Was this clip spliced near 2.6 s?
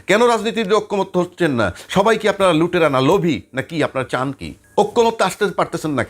no; 1 cut; at 4.5 s

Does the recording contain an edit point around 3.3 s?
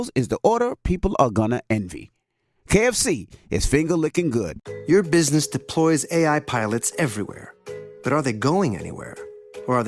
no; 1 cut; at 4.6 s

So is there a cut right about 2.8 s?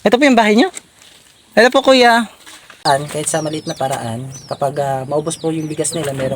yes; 1 cut; at 2.8 s

